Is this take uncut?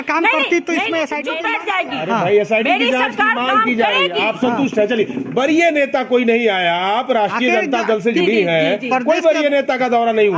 no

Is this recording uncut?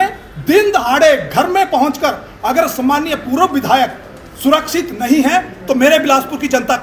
yes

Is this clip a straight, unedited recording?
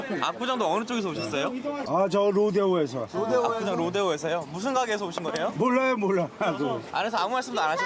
no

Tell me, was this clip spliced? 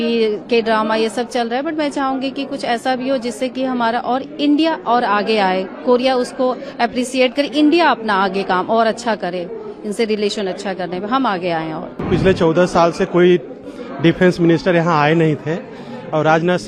no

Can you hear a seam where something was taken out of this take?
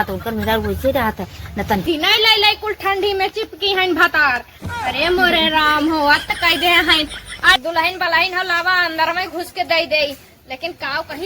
yes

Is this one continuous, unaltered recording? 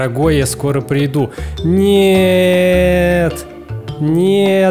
yes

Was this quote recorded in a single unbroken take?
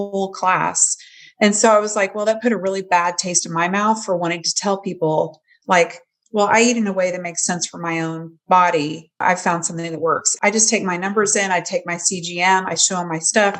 no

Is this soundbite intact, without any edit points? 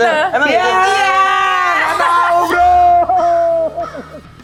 yes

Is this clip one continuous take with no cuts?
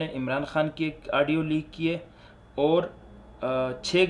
yes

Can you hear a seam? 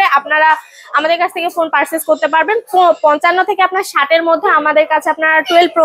no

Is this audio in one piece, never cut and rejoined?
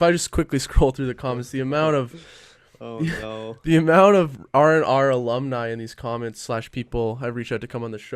yes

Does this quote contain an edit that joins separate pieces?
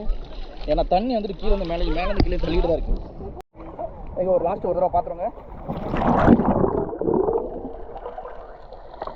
yes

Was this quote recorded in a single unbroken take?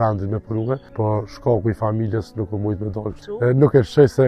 no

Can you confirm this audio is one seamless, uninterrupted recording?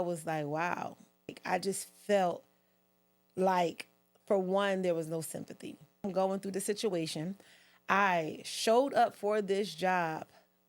no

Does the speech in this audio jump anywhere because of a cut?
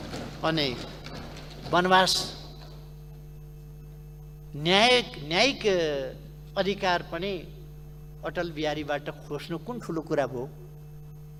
no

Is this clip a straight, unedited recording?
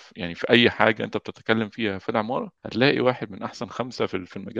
no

